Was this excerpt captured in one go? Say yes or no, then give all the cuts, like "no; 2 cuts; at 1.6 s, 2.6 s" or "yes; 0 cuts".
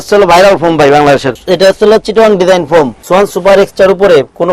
no; 2 cuts; at 1.3 s, 3.0 s